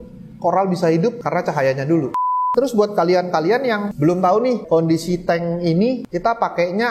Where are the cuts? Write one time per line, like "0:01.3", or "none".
0:02.3
0:03.9
0:04.6
0:06.1